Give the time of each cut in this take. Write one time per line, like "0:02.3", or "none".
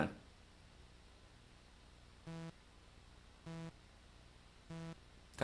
none